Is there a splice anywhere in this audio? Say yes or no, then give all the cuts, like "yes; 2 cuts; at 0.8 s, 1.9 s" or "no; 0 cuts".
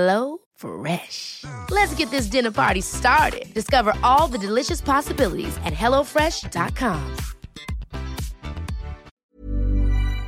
yes; 1 cut; at 9.1 s